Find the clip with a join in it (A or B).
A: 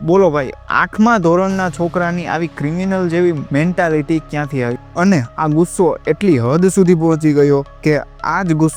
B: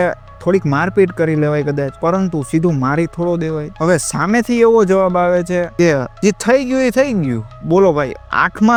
A